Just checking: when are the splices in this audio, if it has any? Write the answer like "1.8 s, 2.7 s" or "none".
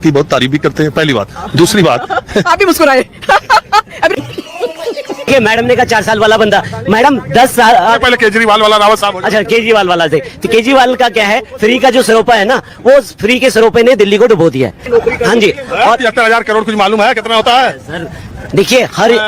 5.3 s, 14.8 s